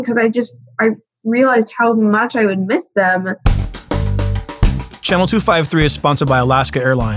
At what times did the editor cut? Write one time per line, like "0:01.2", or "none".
0:03.4